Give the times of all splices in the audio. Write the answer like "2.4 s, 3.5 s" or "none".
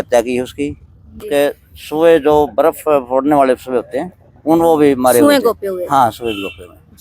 1.2 s